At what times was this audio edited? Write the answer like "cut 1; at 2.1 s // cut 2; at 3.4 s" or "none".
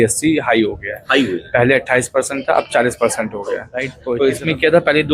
cut 1; at 3.9 s